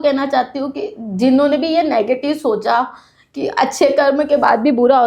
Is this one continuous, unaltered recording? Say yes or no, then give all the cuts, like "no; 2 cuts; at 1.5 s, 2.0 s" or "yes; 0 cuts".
yes; 0 cuts